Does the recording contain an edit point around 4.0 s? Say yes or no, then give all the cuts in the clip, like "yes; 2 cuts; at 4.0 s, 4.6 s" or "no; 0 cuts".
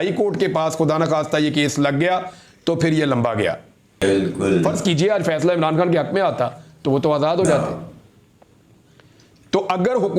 yes; 1 cut; at 4.0 s